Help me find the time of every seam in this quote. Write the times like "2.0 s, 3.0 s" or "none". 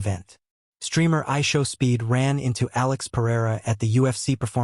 none